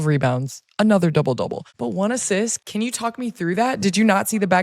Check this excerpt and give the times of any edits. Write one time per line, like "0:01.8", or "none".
0:01.7
0:02.6